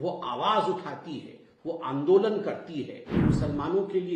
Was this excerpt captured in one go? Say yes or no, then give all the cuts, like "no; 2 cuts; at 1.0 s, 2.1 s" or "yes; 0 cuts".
no; 1 cut; at 3.1 s